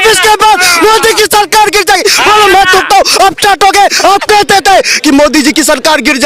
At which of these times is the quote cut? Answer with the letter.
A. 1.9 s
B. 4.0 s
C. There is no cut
B